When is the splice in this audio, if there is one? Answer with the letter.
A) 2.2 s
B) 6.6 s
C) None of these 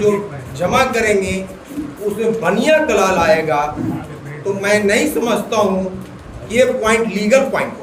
C